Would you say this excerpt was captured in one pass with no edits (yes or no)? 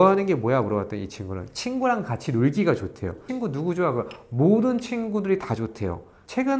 no